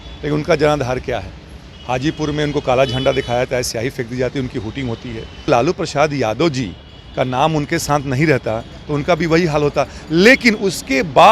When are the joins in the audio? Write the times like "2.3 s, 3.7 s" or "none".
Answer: 5.5 s